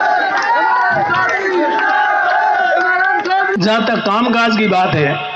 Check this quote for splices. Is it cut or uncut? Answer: cut